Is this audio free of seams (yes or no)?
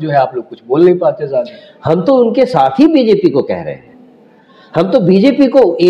yes